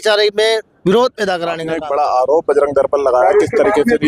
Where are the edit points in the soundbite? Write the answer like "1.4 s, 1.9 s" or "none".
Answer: 1.7 s